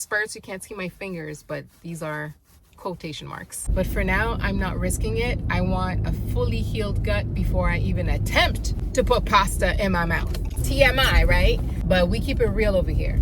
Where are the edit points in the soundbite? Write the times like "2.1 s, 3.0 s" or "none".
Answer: 3.6 s, 10.5 s, 11.7 s